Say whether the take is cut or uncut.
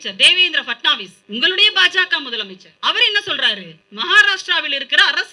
cut